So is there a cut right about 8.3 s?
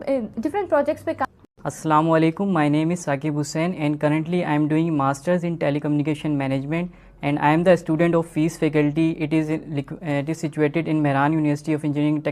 no; 1 cut; at 1.5 s

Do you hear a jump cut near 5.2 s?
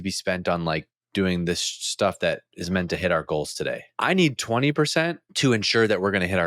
yes; 2 cuts; at 3.9 s, 5.2 s

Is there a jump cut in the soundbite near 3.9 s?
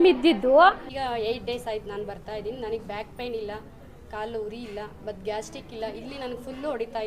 no; 1 cut; at 0.9 s

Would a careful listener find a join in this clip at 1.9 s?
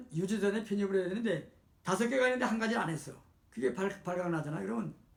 no; 0 cuts

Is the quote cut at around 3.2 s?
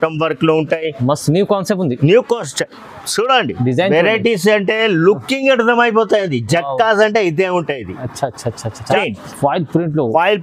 no; 1 cut; at 9.0 s

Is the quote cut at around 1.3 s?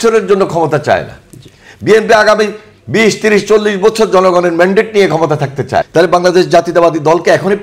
no; 1 cut; at 5.9 s

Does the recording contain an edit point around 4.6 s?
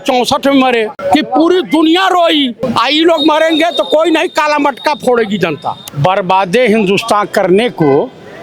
no; 3 cuts; at 1.0 s, 2.6 s, 5.9 s

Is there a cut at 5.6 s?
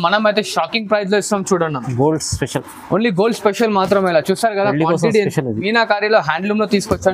yes; 1 cut; at 5.6 s

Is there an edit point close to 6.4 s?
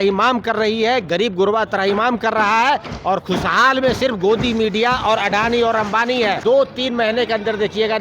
yes; 1 cut; at 6.4 s

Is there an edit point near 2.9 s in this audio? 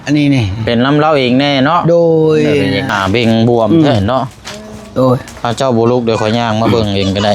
yes; 1 cut; at 2.9 s

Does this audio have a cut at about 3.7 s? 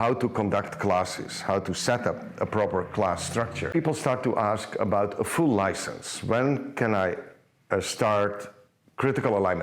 yes; 1 cut; at 3.7 s

